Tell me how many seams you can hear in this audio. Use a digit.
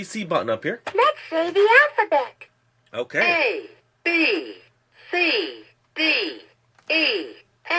1